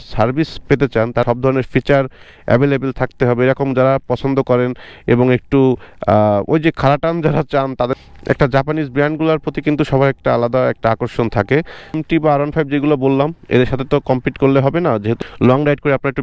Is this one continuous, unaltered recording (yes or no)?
no